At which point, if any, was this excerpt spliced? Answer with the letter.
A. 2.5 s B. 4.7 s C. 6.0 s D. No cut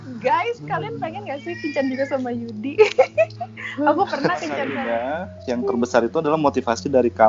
B